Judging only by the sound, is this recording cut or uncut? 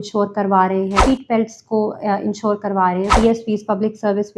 cut